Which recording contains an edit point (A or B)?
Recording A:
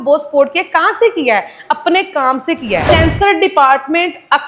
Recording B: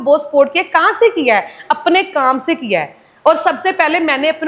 A